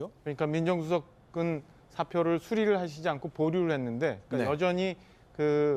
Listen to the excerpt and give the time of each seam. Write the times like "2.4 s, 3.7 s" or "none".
none